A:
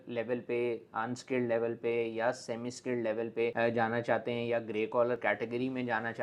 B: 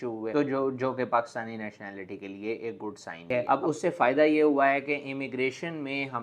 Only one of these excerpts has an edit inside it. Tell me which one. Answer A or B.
B